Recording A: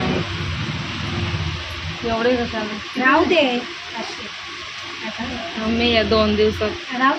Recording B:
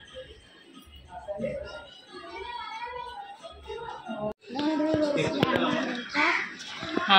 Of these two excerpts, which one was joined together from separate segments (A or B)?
B